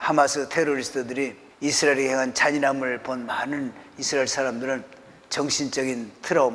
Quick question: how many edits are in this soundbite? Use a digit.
1